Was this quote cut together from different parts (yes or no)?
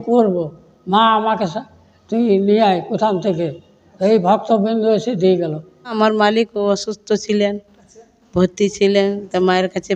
yes